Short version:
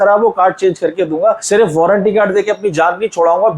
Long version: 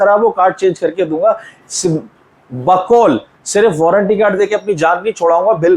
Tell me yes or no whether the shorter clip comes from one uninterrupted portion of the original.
no